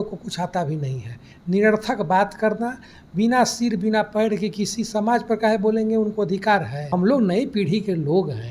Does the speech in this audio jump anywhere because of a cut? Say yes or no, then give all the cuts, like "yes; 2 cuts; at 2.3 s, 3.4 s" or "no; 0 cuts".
yes; 1 cut; at 6.9 s